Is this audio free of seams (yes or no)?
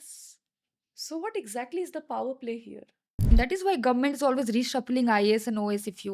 no